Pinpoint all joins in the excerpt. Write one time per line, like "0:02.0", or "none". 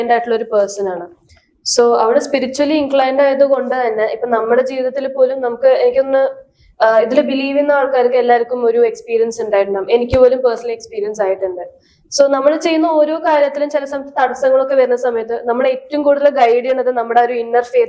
none